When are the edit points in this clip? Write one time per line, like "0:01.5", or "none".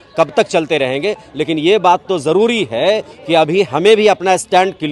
none